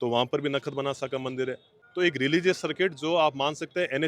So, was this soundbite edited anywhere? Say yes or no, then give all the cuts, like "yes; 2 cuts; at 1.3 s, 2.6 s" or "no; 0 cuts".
yes; 1 cut; at 1.7 s